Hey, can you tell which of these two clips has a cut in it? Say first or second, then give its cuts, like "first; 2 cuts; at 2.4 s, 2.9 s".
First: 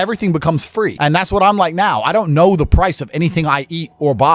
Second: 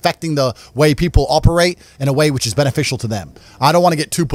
first; 1 cut; at 1.0 s